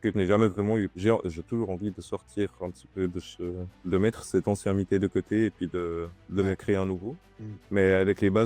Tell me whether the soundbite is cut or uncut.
cut